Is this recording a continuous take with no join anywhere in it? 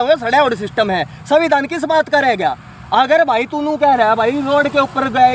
yes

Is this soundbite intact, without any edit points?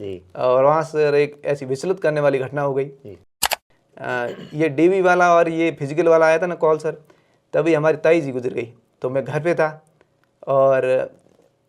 no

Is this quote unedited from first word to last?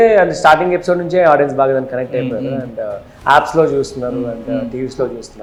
yes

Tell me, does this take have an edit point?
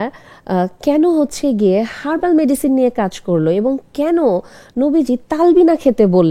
no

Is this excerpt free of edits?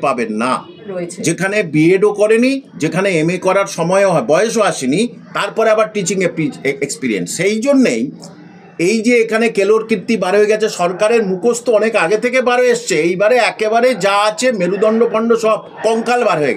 no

